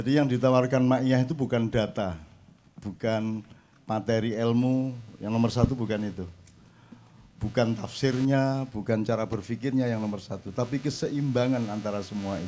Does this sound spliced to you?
no; 0 cuts

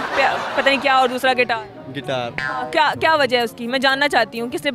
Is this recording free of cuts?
yes; 0 cuts

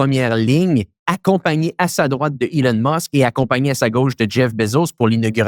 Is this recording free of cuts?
yes; 0 cuts

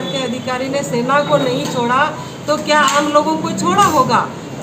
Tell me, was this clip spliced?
no; 0 cuts

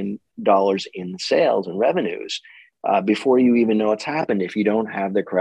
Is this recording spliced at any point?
no; 0 cuts

